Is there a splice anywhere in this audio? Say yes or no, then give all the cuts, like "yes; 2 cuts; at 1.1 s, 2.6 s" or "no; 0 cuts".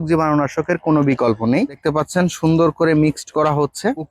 no; 0 cuts